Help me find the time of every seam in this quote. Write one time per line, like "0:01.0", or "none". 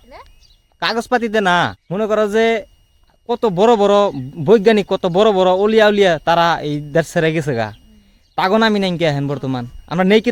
0:01.8

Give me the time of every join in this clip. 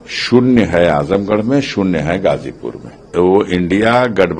0:03.0

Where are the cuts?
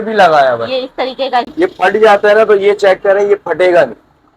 0:01.5

